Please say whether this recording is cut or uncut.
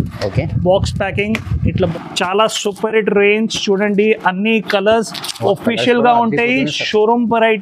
cut